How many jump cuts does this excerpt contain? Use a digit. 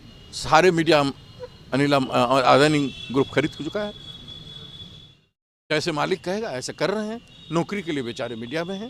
0